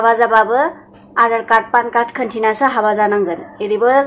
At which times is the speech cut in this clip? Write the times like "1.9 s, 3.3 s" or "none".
none